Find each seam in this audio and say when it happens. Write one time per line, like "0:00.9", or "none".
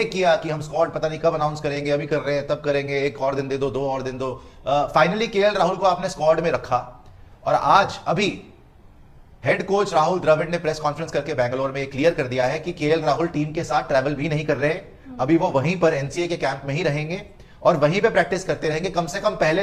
none